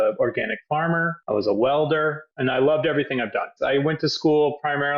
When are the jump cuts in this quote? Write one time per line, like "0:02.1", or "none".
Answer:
0:02.2
0:03.5